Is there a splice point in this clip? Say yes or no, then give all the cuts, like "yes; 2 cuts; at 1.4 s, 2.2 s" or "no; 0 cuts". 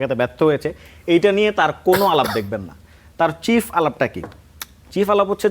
no; 0 cuts